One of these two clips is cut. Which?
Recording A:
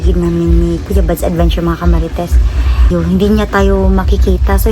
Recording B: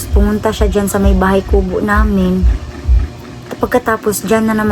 A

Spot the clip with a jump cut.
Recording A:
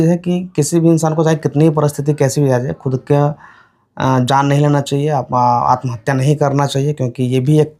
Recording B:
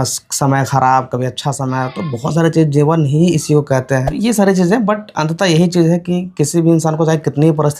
B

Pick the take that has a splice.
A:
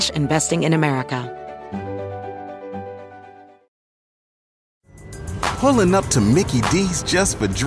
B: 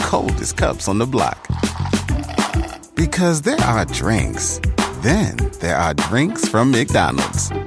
A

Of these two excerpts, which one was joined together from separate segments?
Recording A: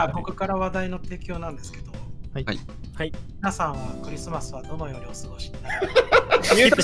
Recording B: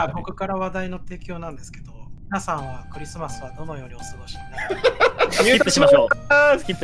B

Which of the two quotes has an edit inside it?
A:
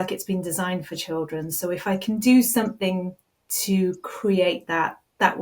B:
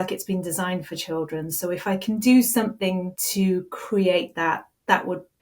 B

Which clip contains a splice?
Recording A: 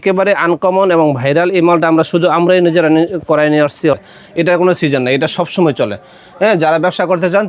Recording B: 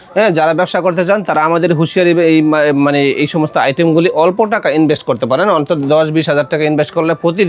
A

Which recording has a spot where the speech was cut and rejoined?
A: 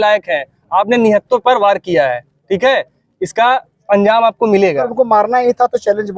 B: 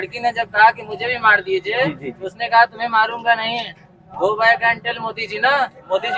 A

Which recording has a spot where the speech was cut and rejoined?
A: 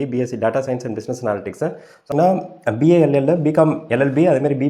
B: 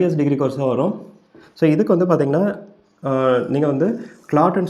A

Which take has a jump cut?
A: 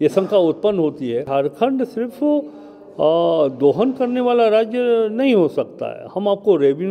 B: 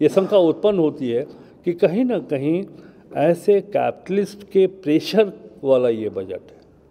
A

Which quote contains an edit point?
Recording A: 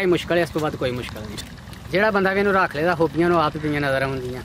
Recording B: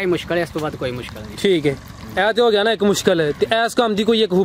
A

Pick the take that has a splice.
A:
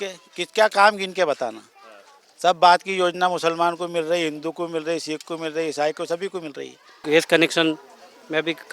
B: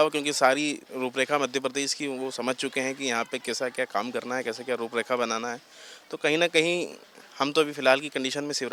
A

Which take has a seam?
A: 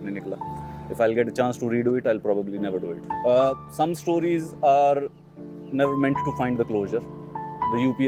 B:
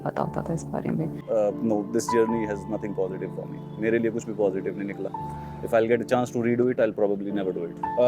B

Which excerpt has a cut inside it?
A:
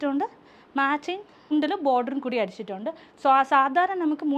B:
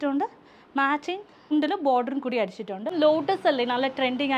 B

